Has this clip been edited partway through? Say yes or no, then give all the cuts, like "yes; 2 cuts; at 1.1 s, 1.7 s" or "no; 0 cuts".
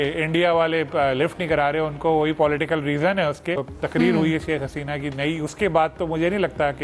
yes; 1 cut; at 3.7 s